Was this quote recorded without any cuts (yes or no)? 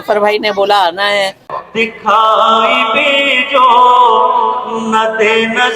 no